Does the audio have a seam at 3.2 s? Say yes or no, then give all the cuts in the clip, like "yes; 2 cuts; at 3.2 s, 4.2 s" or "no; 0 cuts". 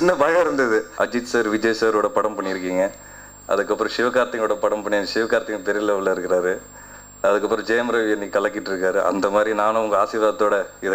no; 1 cut; at 0.9 s